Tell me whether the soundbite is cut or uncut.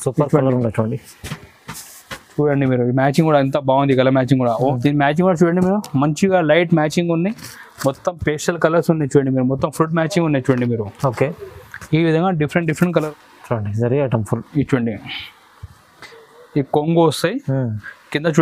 cut